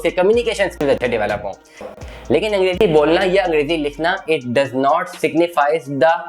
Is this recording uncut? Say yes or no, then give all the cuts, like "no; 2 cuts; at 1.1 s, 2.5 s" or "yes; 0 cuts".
no; 1 cut; at 1.8 s